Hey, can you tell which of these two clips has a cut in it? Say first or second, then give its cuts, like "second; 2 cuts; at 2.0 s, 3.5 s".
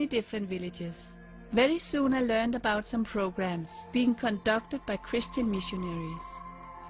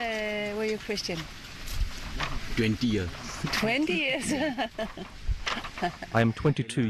first; 1 cut; at 5.3 s